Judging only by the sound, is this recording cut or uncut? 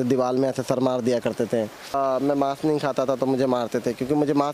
cut